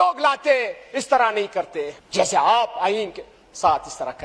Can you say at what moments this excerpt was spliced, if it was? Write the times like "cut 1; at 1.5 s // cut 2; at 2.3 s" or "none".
cut 1; at 2.0 s

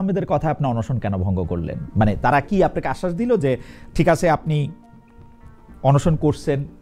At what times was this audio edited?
none

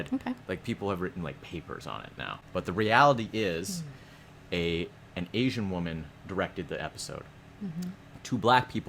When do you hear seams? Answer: cut 1; at 2.3 s

